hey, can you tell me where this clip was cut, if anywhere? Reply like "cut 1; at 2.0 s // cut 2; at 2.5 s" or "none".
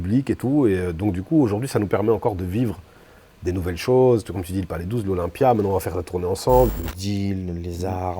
cut 1; at 6.7 s